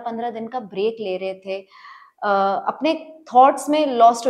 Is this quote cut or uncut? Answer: uncut